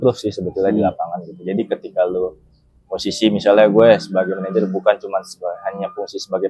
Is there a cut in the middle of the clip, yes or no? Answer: no